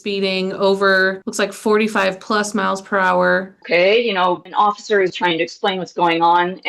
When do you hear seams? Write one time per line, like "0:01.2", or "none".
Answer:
0:01.2
0:03.6
0:04.5